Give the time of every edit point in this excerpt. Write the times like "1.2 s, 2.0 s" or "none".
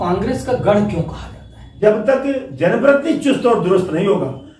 1.7 s